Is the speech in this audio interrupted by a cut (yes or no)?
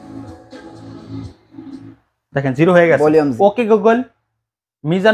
yes